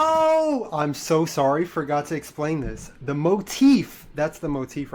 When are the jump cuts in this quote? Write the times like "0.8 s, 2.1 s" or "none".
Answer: none